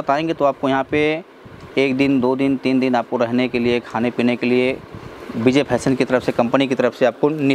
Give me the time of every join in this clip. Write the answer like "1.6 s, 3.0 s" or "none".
none